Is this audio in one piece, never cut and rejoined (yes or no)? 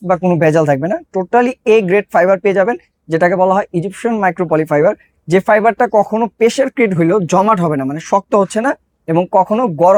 yes